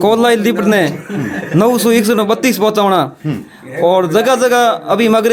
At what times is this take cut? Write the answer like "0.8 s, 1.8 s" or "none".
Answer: none

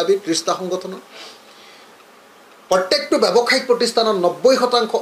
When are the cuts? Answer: none

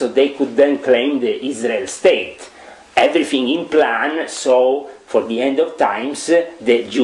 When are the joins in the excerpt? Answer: none

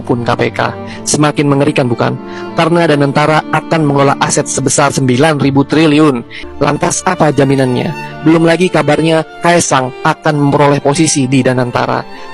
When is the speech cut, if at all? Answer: 6.4 s

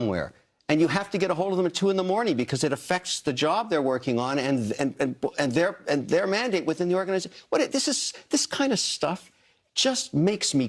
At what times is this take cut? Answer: none

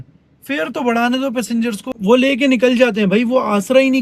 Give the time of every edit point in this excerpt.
1.9 s

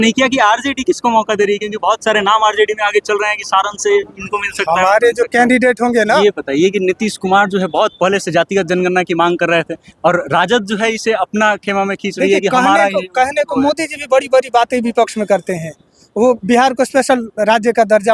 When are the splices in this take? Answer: 6.1 s

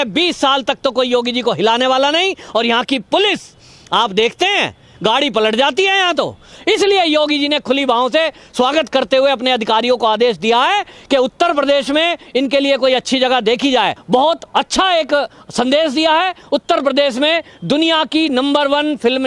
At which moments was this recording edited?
6.5 s, 14.0 s

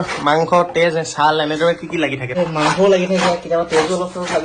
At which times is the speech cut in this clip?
2.4 s

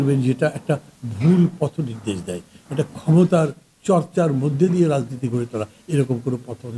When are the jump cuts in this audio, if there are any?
none

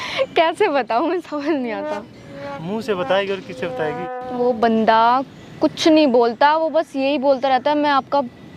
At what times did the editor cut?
4.0 s

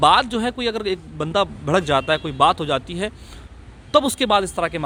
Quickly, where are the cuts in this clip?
none

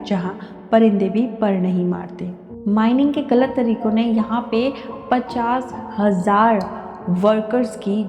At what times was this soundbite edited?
2.5 s

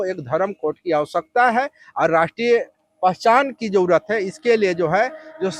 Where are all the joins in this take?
none

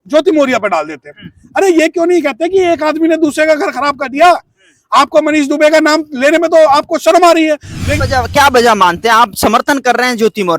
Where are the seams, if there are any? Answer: 7.9 s

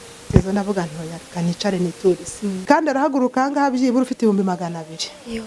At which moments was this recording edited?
2.6 s

